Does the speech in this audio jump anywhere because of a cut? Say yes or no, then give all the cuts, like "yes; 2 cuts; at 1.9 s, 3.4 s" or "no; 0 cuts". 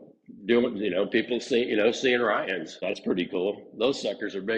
yes; 1 cut; at 2.7 s